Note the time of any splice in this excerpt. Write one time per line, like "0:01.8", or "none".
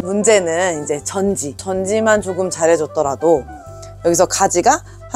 none

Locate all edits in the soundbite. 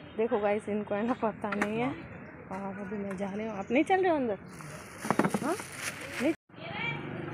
0:06.4

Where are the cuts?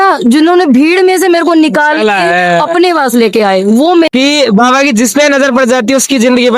0:04.1

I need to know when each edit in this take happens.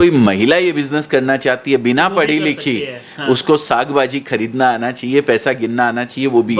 none

